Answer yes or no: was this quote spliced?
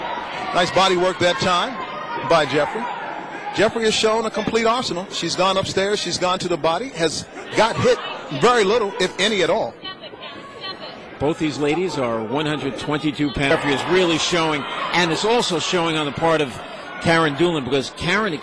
no